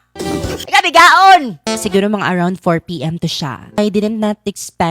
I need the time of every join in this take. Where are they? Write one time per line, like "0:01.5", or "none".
0:01.7
0:03.8